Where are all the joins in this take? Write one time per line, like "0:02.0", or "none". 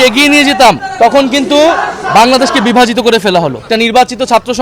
0:00.9
0:03.6

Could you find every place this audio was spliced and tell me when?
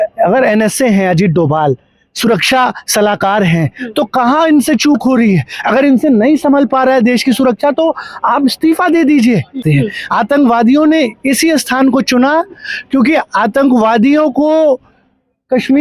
0:09.6

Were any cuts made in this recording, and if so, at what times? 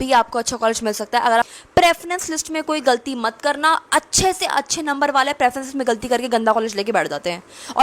0:01.5

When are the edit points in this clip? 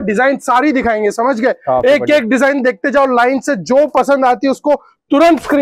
none

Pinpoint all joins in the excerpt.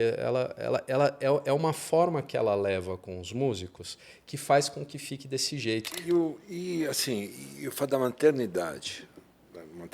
0:05.9

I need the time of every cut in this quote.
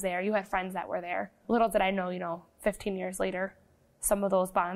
0:01.4

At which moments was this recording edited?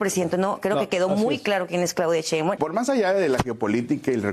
0:02.6

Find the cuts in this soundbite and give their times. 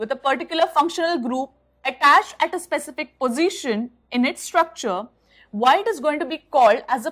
0:01.3

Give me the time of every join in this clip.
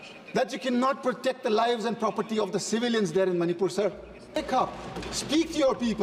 0:04.4

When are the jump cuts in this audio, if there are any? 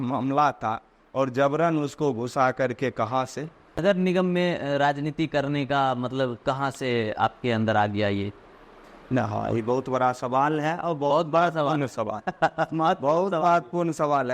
0:03.8

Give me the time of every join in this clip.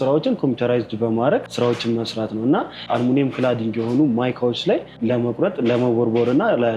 0:01.5
0:02.8
0:05.0

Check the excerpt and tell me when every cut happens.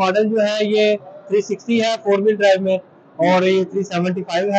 none

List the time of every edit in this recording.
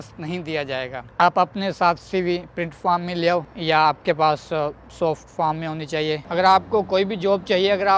0:01.1
0:06.2

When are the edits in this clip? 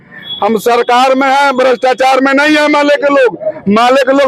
none

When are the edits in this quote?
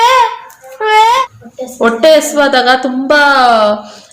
0:01.2

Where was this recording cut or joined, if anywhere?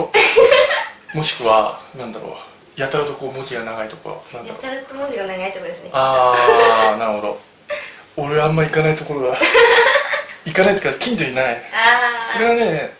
0:02.6

